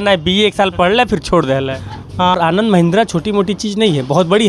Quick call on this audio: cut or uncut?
cut